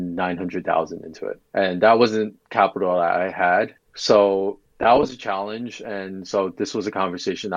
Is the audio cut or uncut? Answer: cut